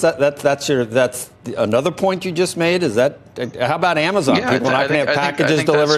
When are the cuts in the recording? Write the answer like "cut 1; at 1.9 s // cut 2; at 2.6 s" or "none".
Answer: none